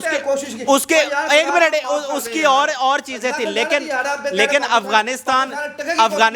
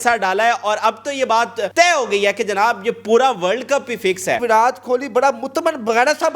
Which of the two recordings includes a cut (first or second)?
second